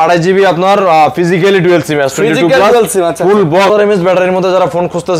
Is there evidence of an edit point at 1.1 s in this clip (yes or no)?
no